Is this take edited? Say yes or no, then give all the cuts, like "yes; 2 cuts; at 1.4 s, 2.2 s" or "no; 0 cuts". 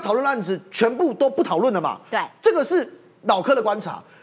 no; 0 cuts